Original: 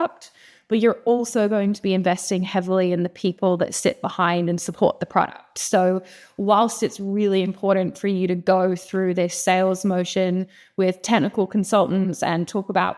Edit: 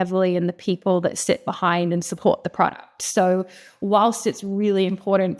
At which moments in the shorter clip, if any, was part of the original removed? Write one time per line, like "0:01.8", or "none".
none